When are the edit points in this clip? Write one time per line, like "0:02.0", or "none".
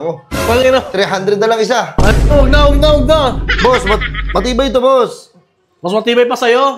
none